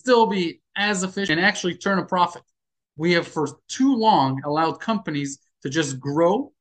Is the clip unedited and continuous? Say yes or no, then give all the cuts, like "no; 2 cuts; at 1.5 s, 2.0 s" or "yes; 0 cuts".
no; 1 cut; at 1.3 s